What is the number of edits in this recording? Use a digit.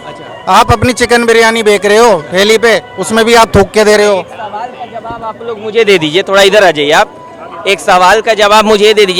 0